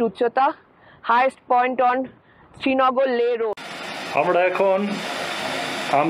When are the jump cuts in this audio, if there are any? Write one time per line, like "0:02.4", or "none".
0:03.5